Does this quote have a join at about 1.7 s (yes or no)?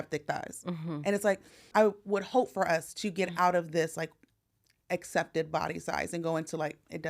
yes